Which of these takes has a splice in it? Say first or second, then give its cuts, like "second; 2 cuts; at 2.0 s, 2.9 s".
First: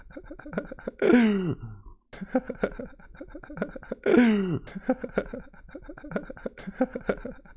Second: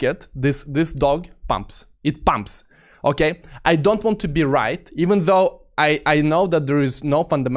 first; 1 cut; at 0.9 s